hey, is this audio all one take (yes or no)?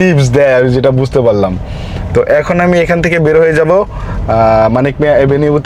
yes